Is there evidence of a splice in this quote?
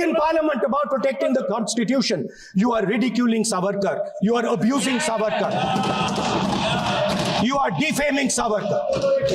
no; 0 cuts

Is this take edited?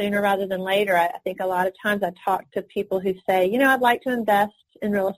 no; 0 cuts

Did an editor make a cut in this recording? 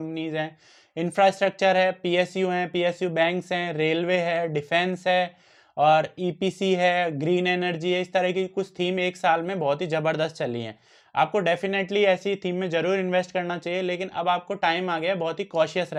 no; 0 cuts

